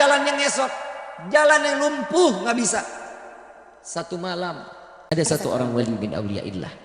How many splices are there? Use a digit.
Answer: 1